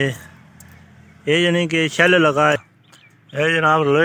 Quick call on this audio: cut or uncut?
cut